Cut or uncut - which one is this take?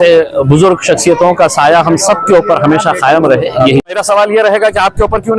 cut